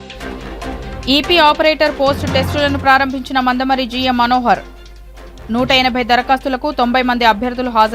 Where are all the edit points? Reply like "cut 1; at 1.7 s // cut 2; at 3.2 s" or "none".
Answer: cut 1; at 1.0 s